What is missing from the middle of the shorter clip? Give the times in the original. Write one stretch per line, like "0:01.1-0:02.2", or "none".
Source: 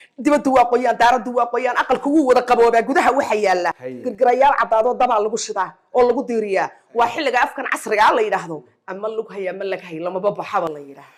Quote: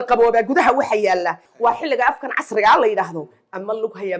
0:03.9-0:06.8